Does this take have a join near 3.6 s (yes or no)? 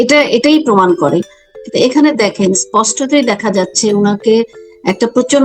no